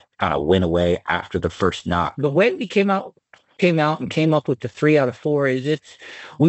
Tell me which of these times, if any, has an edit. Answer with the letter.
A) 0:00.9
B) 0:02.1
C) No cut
B